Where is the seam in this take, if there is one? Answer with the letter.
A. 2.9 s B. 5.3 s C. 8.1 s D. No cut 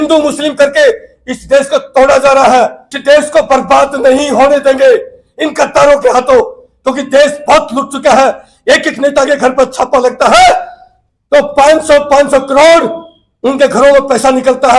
A